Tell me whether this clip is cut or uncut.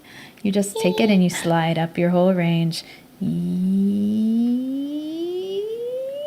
uncut